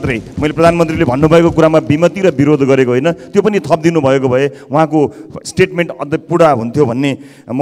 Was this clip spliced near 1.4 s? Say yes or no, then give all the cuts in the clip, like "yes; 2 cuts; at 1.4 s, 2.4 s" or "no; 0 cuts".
no; 0 cuts